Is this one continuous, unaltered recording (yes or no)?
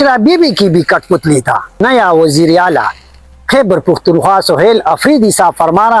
no